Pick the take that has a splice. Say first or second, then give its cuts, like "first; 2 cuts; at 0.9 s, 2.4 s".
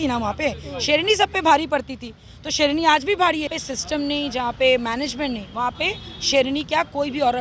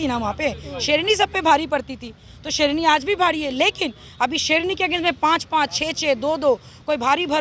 first; 1 cut; at 3.5 s